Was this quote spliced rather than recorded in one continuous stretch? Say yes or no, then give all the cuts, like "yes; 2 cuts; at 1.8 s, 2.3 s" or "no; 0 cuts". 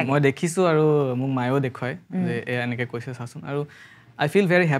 no; 0 cuts